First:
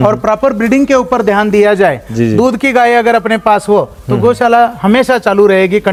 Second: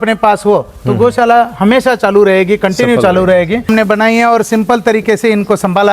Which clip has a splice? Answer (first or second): second